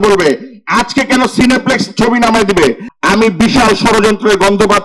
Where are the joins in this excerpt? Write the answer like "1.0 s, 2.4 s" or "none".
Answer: 2.9 s

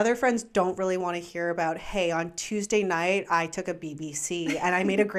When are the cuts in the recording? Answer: none

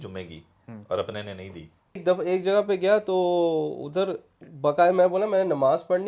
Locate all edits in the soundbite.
2.0 s

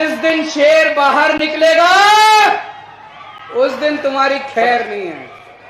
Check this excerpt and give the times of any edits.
none

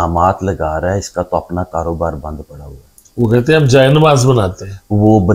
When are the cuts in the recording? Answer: none

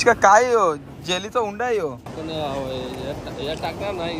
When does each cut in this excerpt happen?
1.9 s

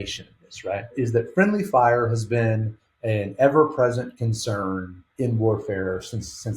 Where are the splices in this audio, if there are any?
0.9 s, 5.0 s

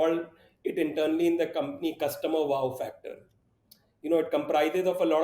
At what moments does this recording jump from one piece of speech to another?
none

